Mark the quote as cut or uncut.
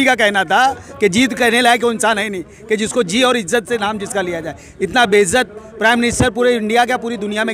uncut